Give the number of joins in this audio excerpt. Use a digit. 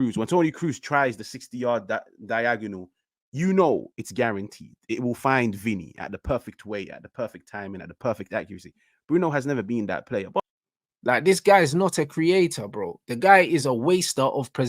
1